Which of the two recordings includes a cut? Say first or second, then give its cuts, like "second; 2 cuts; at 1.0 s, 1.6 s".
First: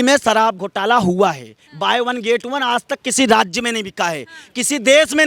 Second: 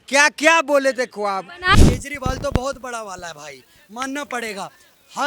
second; 1 cut; at 1.7 s